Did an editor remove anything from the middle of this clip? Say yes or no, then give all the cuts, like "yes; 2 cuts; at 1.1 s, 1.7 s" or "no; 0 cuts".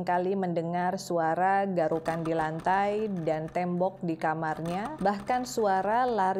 no; 0 cuts